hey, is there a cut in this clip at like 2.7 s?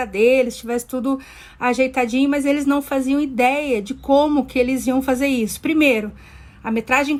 no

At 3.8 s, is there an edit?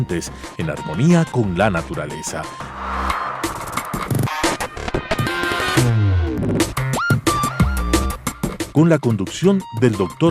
no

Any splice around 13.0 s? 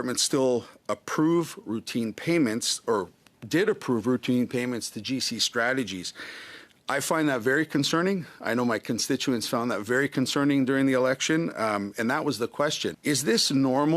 yes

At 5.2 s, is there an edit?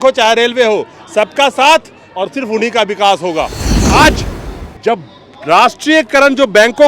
no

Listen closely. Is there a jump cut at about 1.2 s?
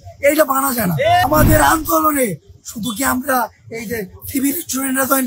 yes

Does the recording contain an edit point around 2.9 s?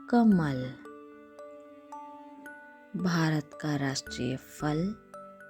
yes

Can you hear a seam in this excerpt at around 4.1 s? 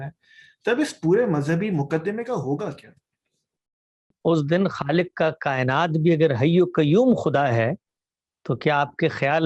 yes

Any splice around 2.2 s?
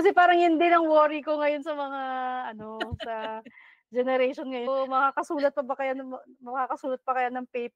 no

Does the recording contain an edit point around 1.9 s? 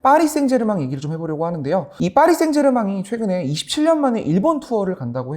yes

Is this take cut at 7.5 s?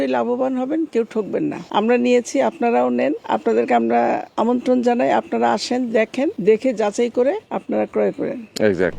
yes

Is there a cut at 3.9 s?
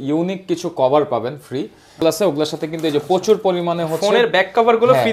no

